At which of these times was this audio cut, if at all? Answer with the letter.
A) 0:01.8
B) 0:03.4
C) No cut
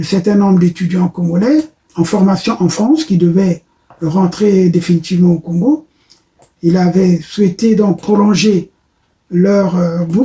A